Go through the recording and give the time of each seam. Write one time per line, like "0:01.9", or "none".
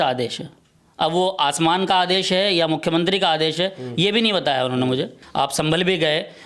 0:05.2